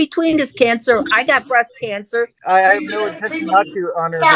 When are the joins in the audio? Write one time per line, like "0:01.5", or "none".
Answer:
0:02.4